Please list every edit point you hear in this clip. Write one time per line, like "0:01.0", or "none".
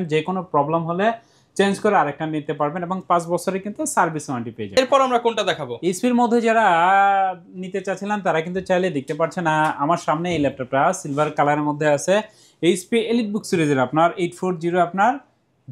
none